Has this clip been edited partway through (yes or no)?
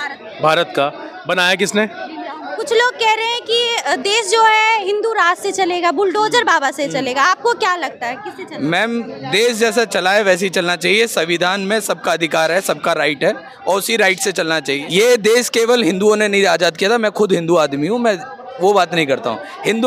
yes